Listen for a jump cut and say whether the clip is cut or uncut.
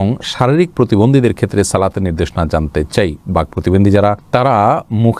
uncut